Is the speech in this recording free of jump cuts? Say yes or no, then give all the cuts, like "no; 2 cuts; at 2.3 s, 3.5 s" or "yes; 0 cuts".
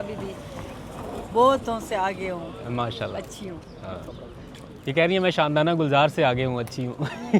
yes; 0 cuts